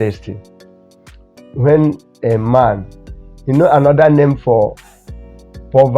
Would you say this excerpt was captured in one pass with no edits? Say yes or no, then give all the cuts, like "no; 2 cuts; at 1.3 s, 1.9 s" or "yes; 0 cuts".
yes; 0 cuts